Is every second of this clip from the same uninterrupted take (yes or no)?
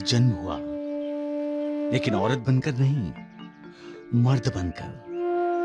yes